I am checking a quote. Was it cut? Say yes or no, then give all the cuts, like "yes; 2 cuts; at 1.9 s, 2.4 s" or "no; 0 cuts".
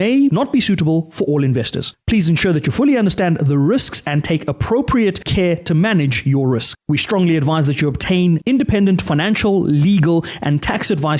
yes; 1 cut; at 6.7 s